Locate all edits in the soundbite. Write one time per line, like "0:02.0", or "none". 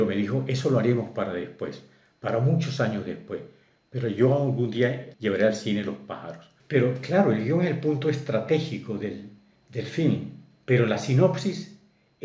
0:06.5